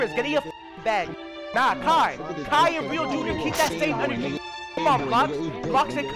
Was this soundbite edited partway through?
yes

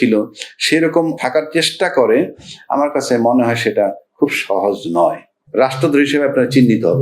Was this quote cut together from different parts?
yes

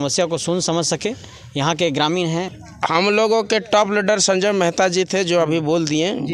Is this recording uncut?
no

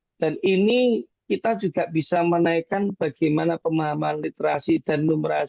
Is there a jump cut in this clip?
no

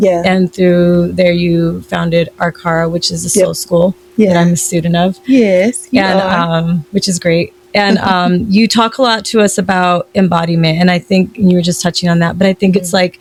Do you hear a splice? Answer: no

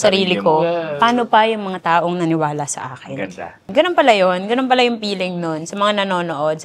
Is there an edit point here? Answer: yes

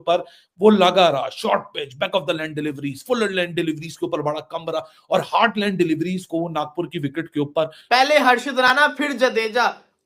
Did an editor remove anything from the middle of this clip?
yes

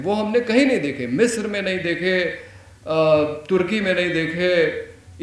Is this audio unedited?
yes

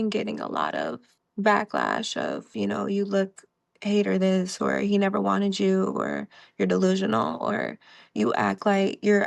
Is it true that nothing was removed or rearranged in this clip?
no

